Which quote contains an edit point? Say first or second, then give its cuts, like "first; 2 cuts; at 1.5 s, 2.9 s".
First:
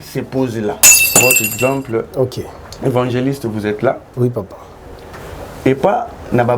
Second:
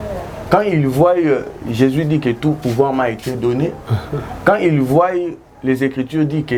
first; 1 cut; at 1.1 s